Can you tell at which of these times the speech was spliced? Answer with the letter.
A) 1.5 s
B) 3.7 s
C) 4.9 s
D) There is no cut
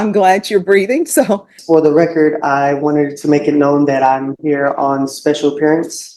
A